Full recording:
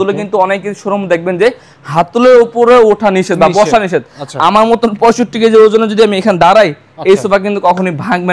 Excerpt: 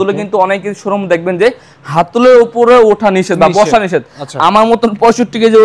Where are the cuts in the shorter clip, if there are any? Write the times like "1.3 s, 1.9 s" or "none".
none